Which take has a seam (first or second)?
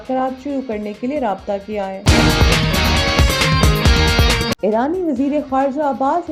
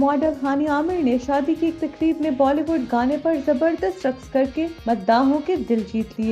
first